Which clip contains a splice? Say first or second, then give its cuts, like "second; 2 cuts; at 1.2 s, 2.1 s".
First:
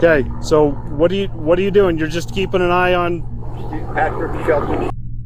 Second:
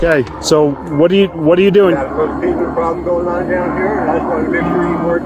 second; 1 cut; at 1.9 s